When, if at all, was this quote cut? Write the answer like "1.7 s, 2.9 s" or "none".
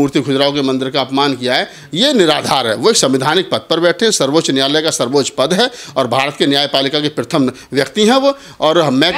none